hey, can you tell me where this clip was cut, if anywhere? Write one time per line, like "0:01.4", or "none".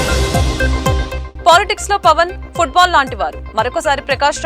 0:01.0